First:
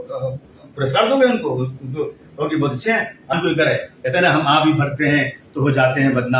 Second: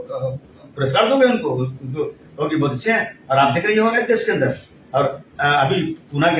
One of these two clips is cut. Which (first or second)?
first